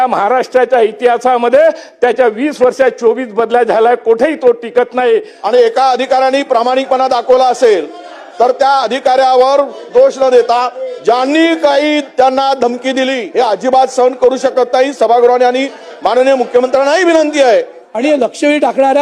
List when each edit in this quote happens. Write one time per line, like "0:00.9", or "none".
0:05.3
0:13.2
0:17.8